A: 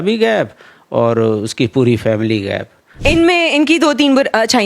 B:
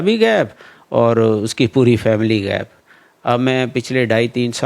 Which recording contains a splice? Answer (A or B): A